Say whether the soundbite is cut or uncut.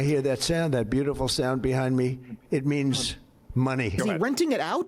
cut